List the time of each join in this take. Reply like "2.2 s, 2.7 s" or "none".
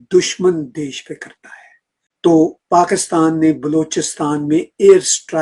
2.1 s